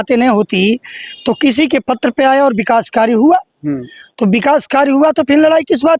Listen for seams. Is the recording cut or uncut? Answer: uncut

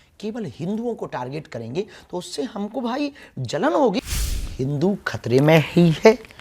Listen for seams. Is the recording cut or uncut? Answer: cut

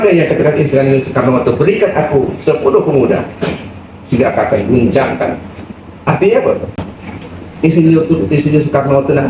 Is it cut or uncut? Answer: uncut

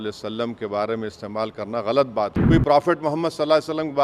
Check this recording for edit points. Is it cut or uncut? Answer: cut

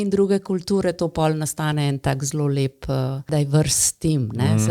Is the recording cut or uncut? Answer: cut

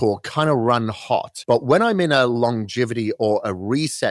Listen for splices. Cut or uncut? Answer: cut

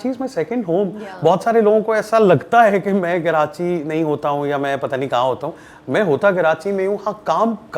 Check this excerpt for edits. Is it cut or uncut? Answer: uncut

